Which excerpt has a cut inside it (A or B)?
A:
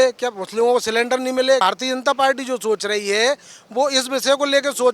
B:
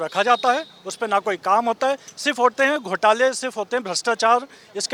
A